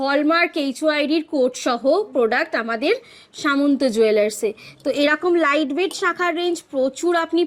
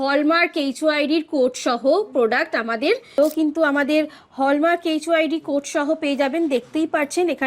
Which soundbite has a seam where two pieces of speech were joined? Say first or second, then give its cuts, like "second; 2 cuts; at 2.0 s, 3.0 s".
second; 1 cut; at 3.1 s